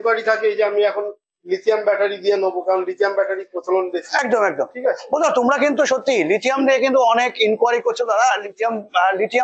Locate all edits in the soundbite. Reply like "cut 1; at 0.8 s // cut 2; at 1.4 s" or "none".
none